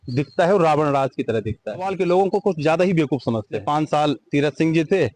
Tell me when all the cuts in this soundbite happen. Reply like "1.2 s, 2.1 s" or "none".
1.9 s, 3.5 s